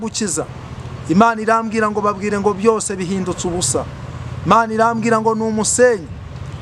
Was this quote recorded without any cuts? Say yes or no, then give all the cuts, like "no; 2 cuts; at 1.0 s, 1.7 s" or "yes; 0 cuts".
yes; 0 cuts